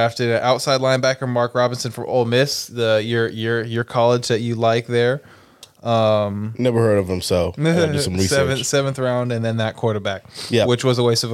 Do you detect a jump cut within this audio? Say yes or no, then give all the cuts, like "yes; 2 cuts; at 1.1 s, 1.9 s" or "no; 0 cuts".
no; 0 cuts